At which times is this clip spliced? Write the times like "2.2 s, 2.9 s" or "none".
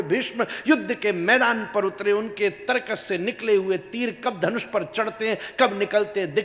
none